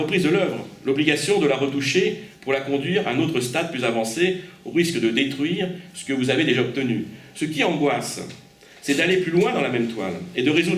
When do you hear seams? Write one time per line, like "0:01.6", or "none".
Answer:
0:02.4